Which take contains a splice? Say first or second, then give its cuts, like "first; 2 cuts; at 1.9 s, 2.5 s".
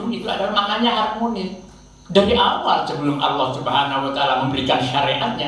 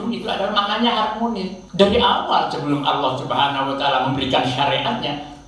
second; 1 cut; at 1.6 s